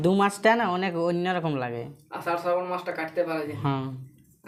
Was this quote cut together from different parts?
no; 0 cuts

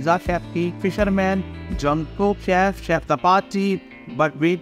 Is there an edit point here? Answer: no; 0 cuts

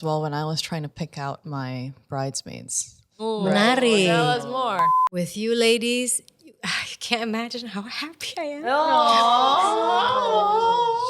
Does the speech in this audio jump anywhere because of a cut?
yes; 1 cut; at 4.9 s

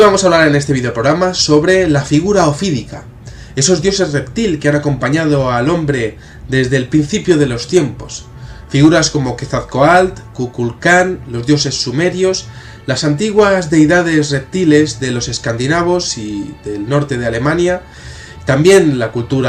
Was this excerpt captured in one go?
yes; 0 cuts

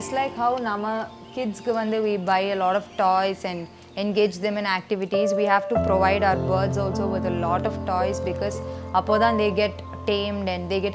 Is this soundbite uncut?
yes; 0 cuts

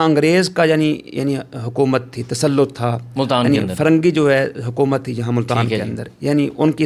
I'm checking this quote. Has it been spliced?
no; 0 cuts

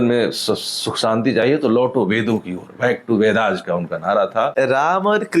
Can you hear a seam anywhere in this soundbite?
yes; 1 cut; at 4.5 s

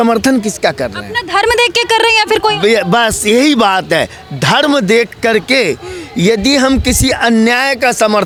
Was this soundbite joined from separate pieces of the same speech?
no; 0 cuts

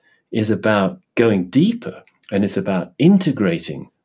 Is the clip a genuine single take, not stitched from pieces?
yes; 0 cuts

